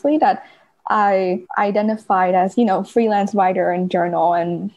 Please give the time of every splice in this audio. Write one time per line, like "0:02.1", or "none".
0:01.5